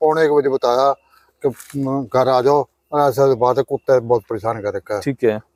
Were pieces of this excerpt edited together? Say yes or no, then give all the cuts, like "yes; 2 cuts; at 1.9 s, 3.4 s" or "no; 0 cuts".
no; 0 cuts